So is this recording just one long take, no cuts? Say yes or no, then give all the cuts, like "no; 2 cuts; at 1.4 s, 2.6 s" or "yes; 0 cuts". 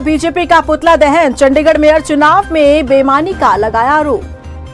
yes; 0 cuts